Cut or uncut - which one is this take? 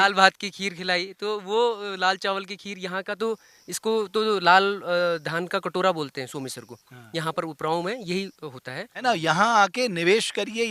uncut